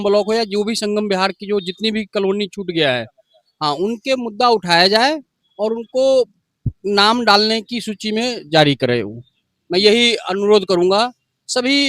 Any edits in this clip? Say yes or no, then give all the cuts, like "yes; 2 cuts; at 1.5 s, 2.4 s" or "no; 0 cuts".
no; 0 cuts